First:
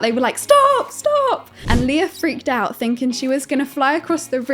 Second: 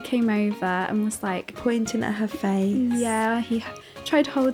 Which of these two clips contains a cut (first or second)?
first